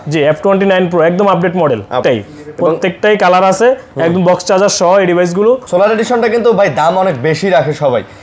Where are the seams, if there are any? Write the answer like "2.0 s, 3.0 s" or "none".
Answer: 2.0 s, 5.6 s